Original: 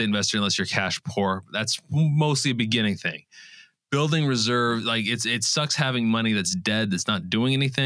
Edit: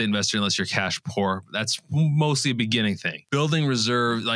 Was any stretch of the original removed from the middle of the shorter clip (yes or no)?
yes